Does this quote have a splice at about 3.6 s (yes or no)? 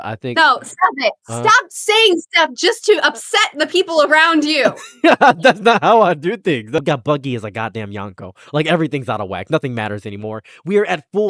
no